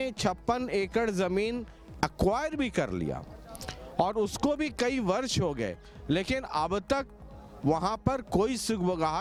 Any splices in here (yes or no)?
no